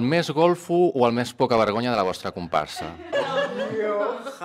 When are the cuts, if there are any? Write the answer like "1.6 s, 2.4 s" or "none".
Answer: 3.1 s